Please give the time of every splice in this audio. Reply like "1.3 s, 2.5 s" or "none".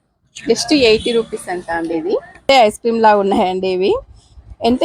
2.5 s